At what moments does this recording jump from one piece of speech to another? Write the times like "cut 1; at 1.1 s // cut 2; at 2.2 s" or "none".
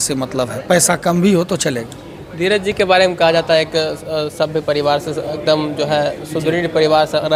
none

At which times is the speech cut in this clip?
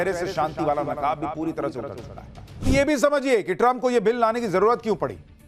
cut 1; at 2.4 s

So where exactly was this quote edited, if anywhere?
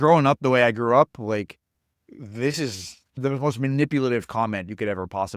cut 1; at 3.2 s

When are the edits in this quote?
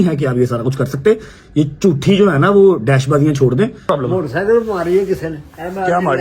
cut 1; at 3.8 s

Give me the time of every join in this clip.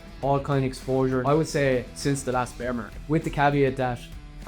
cut 1; at 1.2 s // cut 2; at 2.9 s

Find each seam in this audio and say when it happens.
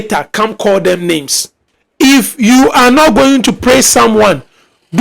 cut 1; at 1.7 s

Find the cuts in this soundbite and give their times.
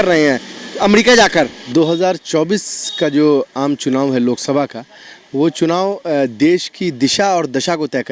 cut 1; at 1.7 s

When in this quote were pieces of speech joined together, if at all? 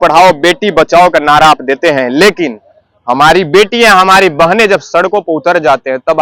none

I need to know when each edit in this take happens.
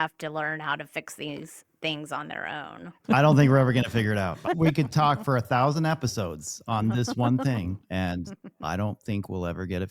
cut 1; at 3.0 s // cut 2; at 7.8 s

